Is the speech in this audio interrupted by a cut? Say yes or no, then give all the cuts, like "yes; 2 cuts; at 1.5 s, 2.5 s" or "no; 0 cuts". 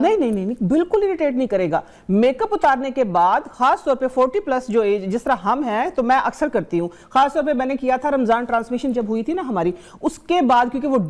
no; 0 cuts